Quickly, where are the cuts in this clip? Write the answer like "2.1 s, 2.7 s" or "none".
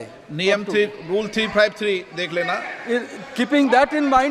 none